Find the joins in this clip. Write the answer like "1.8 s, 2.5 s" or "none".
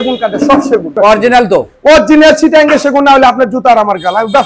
1.0 s